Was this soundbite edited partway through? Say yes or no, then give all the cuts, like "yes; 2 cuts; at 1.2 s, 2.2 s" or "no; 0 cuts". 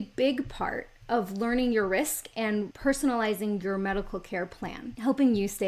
no; 0 cuts